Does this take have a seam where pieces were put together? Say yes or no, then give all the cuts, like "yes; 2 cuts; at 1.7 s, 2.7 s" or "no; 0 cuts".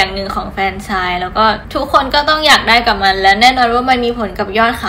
no; 0 cuts